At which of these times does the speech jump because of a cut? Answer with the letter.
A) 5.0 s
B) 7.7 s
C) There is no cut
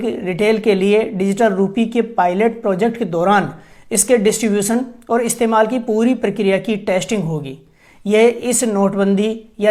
C